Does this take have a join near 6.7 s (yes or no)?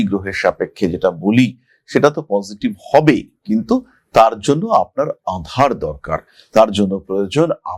no